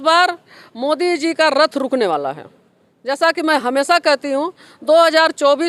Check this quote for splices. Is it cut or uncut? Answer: uncut